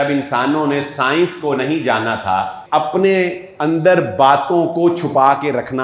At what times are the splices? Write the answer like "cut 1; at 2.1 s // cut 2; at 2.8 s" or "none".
cut 1; at 2.6 s